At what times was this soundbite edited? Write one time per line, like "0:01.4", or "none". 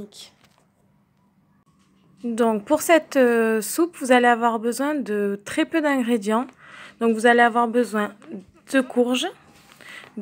0:07.7